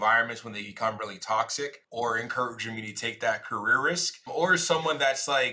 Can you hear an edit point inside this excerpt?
yes; 1 cut; at 1.8 s

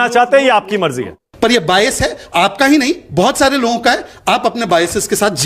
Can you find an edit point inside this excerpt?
yes; 1 cut; at 1.3 s

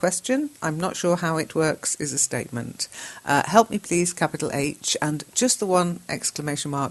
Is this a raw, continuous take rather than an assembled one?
no; 1 cut; at 1.8 s

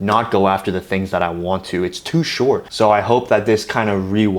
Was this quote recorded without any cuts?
no; 1 cut; at 2.7 s

